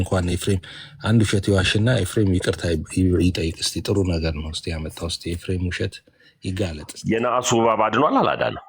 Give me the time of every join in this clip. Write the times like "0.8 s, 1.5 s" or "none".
6.9 s